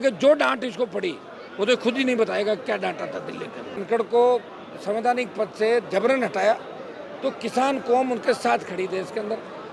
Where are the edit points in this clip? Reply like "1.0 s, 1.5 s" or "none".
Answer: 3.8 s